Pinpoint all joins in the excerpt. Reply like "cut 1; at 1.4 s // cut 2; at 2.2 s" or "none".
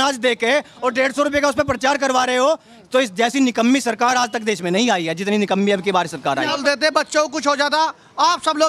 cut 1; at 6.6 s